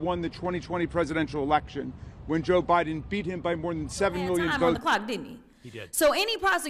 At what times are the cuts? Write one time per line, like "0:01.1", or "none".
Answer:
0:04.8